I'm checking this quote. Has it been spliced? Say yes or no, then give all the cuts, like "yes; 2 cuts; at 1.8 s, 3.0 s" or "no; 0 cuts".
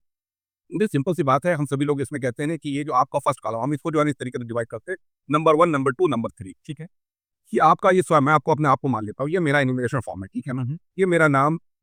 no; 0 cuts